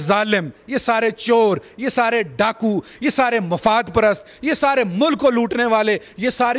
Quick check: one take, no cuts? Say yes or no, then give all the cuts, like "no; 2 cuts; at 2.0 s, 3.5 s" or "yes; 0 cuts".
yes; 0 cuts